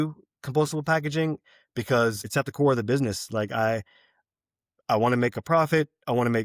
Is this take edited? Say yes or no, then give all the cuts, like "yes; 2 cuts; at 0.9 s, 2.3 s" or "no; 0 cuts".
yes; 1 cut; at 2.3 s